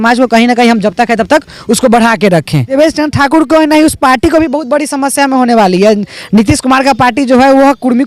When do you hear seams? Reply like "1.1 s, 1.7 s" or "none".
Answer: 2.7 s